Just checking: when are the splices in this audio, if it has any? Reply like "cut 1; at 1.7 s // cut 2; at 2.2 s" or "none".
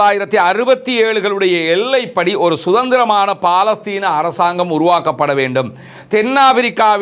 none